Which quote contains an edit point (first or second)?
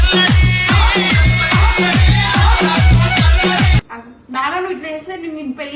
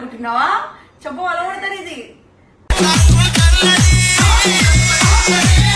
first